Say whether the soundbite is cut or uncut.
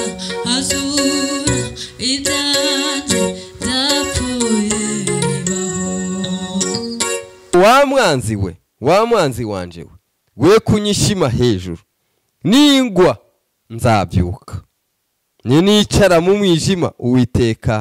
cut